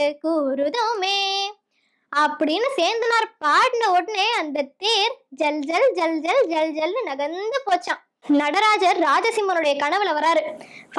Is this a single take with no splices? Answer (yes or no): no